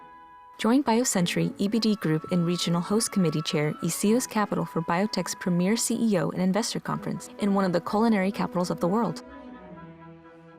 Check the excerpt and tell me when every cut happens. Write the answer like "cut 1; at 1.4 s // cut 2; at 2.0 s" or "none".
cut 1; at 9.1 s